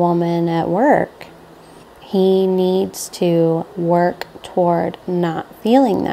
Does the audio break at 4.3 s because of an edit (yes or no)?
no